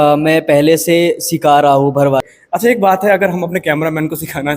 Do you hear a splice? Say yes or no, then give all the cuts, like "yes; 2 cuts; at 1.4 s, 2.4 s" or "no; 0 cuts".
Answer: yes; 1 cut; at 2.2 s